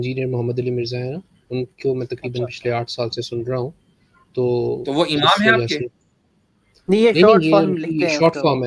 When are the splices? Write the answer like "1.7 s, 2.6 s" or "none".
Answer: none